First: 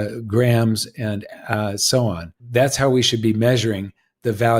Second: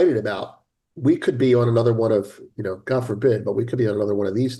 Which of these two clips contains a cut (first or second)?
first